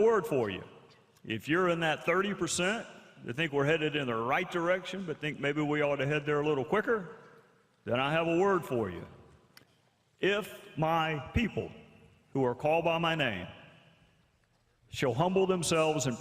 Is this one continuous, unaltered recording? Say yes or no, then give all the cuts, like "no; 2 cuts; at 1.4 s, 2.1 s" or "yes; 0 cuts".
no; 1 cut; at 12.6 s